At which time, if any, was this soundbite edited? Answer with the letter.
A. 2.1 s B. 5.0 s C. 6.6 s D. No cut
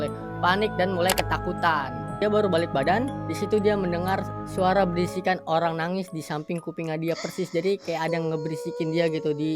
A